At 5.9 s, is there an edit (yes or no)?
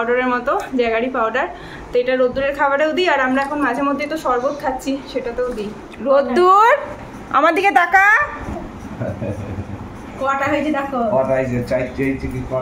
yes